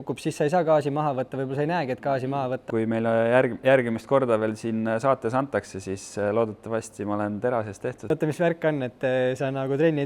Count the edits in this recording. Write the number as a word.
two